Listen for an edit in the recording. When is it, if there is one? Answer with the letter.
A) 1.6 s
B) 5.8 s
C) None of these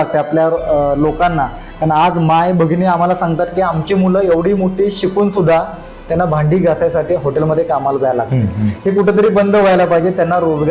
C